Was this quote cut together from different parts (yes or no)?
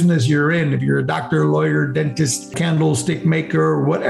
yes